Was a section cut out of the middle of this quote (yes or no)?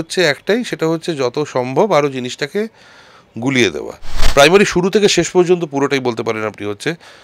yes